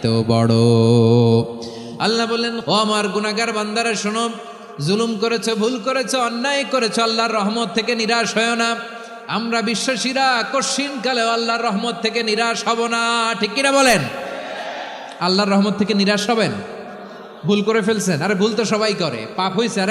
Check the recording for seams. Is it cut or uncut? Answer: cut